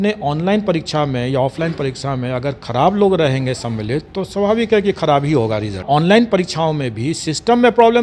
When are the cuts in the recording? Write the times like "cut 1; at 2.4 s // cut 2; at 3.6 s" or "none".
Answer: cut 1; at 5.8 s